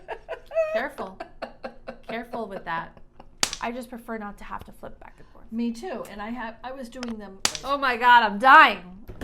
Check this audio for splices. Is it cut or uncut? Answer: cut